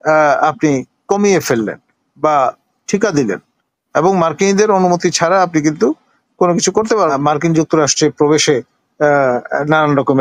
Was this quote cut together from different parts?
yes; 1 cut; at 7.1 s

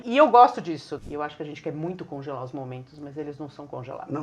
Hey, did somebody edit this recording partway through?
yes; 1 cut; at 0.9 s

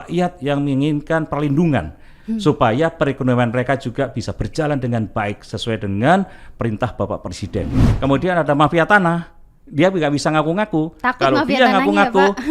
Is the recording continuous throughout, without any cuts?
no; 1 cut; at 7.9 s

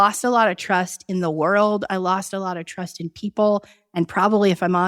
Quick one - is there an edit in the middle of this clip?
no; 0 cuts

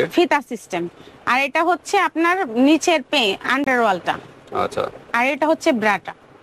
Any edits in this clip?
no; 0 cuts

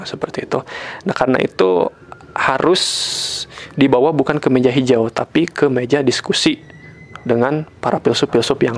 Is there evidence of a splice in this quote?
no; 0 cuts

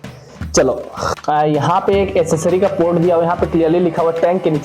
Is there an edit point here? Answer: yes; 1 cut; at 1.1 s

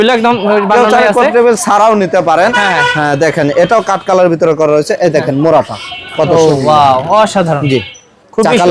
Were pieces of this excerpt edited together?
no; 0 cuts

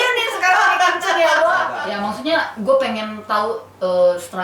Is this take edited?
yes; 1 cut; at 1.8 s

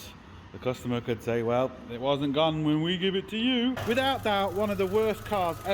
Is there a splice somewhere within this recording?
yes; 1 cut; at 3.8 s

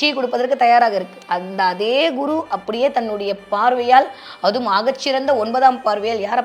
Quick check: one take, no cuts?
yes; 0 cuts

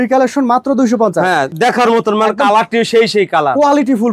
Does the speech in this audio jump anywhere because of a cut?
yes; 1 cut; at 1.5 s

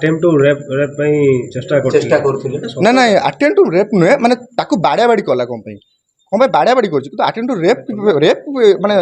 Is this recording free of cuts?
yes; 0 cuts

